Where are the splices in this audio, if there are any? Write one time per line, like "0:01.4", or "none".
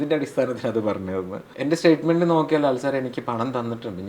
0:01.4

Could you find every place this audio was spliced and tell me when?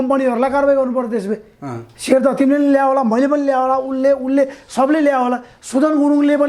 none

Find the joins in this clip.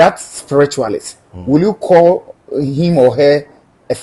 none

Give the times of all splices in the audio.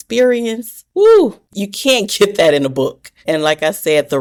none

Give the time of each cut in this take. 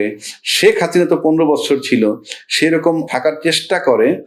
0:03.1

